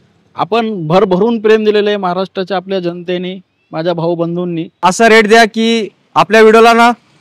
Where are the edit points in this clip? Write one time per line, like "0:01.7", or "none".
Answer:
0:04.8